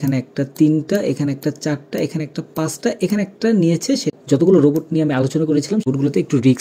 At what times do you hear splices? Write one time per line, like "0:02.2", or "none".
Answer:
0:04.2
0:05.9